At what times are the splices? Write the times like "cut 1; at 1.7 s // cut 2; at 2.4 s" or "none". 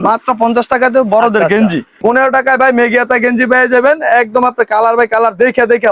cut 1; at 1.9 s